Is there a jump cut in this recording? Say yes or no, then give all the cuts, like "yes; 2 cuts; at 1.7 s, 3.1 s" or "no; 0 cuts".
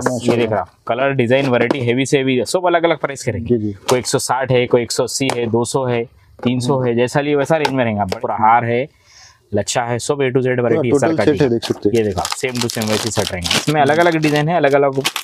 yes; 1 cut; at 8.1 s